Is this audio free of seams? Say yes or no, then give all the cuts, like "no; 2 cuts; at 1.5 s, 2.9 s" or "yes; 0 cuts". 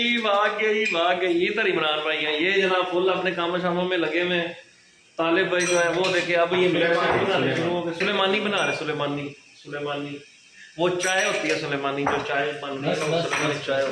yes; 0 cuts